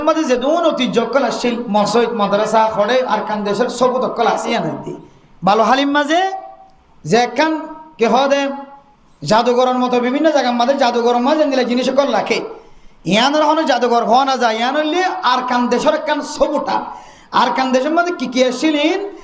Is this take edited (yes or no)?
yes